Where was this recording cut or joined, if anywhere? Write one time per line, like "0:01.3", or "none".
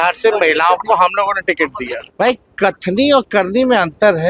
0:02.0